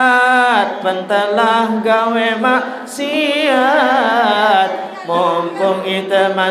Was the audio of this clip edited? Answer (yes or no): no